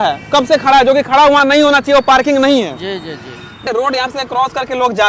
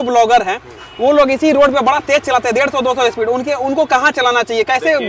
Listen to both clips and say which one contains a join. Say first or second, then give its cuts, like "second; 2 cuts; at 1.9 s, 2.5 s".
first; 1 cut; at 3.6 s